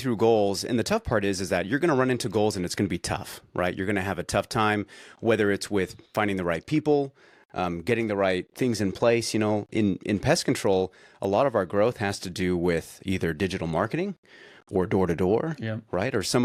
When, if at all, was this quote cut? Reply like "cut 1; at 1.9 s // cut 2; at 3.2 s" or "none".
none